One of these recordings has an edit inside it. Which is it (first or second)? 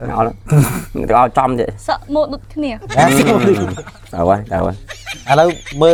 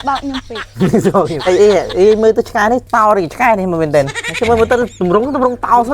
second